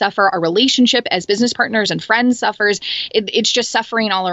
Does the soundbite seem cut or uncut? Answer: uncut